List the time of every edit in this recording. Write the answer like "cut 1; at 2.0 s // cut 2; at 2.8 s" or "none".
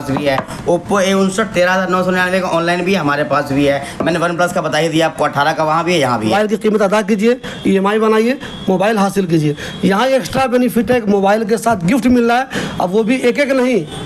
cut 1; at 6.3 s